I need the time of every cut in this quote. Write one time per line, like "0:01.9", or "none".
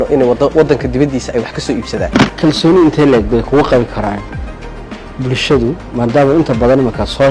0:02.2